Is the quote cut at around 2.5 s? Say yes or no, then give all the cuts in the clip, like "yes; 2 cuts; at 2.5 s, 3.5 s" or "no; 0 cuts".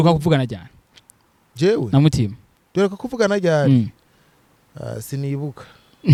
no; 0 cuts